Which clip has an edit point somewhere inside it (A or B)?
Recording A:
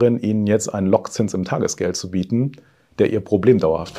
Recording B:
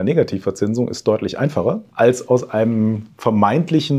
B